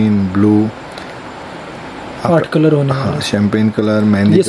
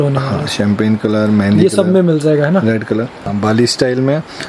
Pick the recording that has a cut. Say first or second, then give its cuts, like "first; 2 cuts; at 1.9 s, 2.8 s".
second; 1 cut; at 3.2 s